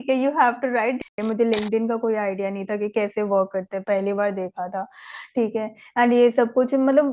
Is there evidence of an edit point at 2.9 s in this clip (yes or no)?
no